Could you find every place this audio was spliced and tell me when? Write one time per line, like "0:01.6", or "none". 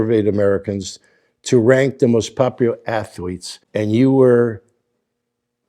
0:03.6